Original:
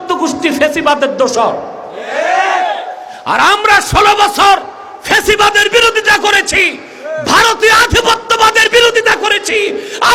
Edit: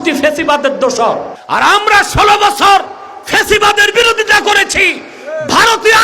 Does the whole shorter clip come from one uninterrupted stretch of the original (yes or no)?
no